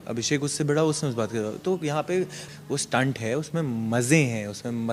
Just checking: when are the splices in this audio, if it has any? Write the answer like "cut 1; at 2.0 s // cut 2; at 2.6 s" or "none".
cut 1; at 2.5 s